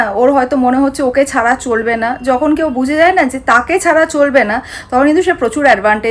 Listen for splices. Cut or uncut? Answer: uncut